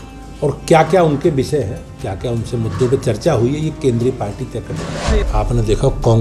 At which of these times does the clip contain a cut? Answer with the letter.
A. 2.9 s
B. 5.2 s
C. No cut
B